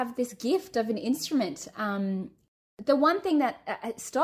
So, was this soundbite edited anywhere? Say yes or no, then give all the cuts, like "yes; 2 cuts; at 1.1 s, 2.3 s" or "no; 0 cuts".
yes; 1 cut; at 2.5 s